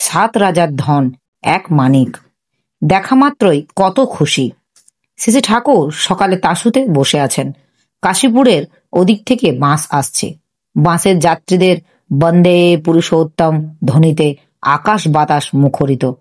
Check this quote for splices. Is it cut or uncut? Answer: uncut